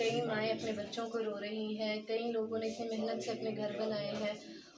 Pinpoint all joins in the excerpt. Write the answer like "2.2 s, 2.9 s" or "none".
none